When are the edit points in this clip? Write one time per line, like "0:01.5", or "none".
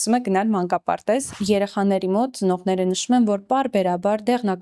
0:01.3